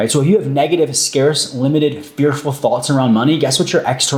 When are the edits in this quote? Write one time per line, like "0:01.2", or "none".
none